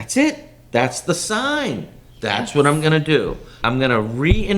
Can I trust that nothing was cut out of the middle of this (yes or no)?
no